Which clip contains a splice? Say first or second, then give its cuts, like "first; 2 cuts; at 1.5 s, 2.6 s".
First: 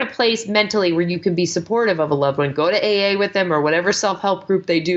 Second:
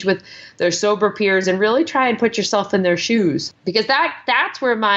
second; 1 cut; at 3.5 s